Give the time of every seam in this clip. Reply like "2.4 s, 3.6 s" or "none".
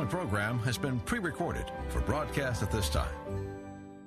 none